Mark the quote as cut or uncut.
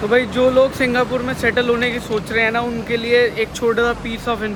uncut